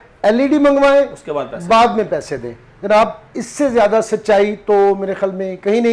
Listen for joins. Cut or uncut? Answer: uncut